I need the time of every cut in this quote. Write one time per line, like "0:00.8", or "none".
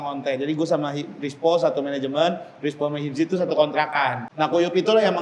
0:04.2